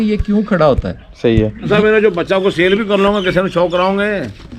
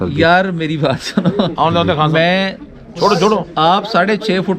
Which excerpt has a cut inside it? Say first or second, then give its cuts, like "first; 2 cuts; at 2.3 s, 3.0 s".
first; 1 cut; at 1.6 s